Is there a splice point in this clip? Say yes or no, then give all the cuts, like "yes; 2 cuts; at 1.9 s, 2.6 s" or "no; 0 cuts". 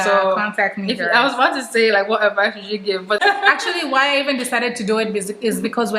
yes; 1 cut; at 3.2 s